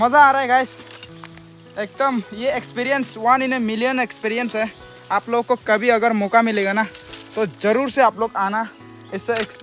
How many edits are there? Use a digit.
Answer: 0